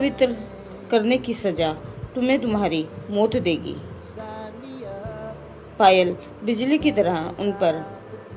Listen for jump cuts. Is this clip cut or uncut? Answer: cut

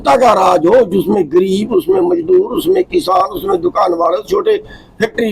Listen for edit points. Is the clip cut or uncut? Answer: uncut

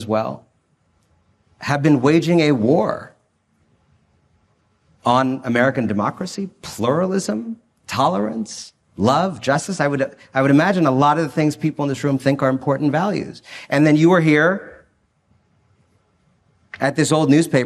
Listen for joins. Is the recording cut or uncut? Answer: uncut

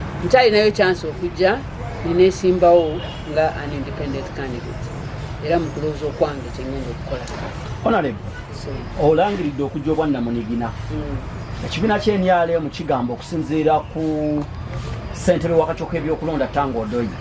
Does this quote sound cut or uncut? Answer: cut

